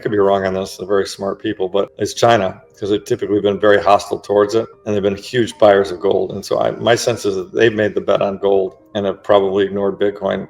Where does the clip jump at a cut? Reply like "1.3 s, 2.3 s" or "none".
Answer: 1.9 s, 4.8 s, 8.8 s